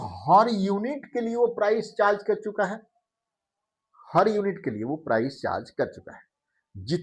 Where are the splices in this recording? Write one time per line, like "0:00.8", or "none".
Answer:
none